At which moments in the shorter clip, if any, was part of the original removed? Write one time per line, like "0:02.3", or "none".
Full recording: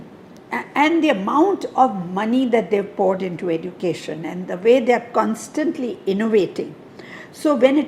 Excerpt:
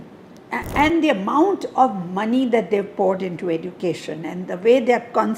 none